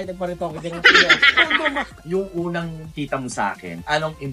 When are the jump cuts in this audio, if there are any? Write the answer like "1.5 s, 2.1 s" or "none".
2.0 s